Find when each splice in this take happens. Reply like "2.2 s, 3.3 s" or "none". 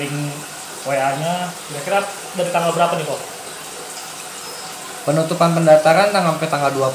1.6 s